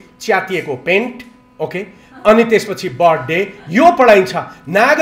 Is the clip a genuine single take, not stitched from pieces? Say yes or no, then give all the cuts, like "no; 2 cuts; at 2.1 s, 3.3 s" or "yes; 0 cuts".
yes; 0 cuts